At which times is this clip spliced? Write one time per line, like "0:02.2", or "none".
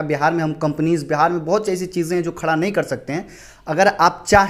none